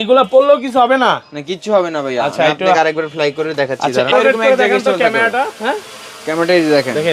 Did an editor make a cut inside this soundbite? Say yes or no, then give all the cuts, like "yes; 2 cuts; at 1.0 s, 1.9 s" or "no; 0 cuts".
no; 0 cuts